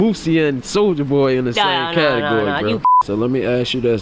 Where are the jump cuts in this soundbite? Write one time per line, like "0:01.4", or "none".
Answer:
0:02.9

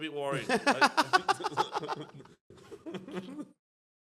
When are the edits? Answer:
none

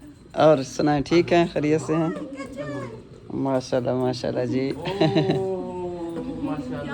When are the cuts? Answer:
none

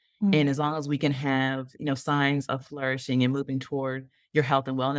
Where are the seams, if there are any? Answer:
none

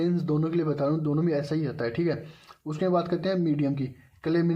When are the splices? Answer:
none

